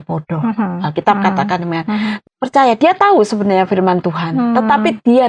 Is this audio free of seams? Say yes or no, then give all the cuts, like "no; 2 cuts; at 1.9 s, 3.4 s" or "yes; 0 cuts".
no; 1 cut; at 2.2 s